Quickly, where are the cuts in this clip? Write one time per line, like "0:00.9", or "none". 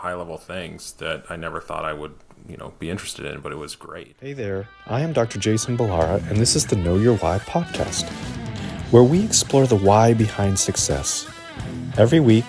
0:04.3